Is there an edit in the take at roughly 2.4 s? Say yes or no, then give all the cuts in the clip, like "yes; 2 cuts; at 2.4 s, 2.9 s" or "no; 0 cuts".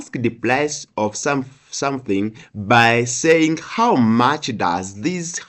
no; 0 cuts